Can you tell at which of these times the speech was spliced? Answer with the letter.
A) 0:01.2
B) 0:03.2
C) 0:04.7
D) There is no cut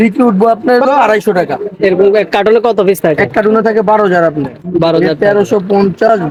D